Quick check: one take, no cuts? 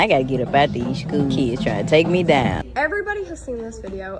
yes; 0 cuts

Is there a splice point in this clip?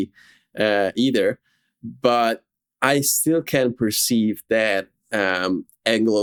no; 0 cuts

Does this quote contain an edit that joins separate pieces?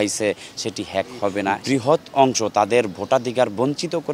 yes; 1 cut; at 1.6 s

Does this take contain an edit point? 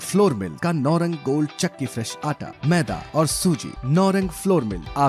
no; 0 cuts

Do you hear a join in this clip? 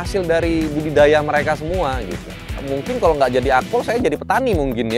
yes; 1 cut; at 2.7 s

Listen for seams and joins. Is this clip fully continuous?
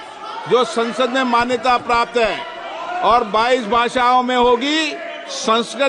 yes; 0 cuts

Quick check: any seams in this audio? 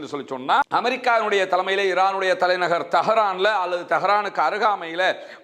no; 0 cuts

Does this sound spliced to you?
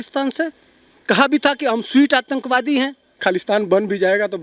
yes; 1 cut; at 3.2 s

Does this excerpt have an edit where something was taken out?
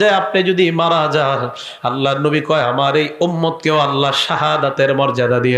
no; 0 cuts

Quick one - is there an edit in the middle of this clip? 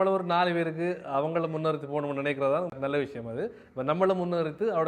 yes; 1 cut; at 2.7 s

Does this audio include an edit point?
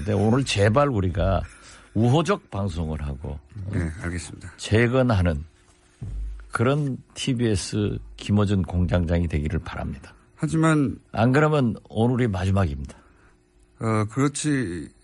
no; 0 cuts

